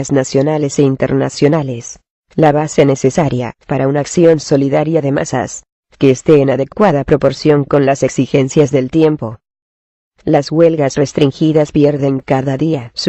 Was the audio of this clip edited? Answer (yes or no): no